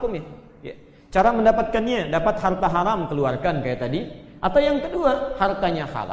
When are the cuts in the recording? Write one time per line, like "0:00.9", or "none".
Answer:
none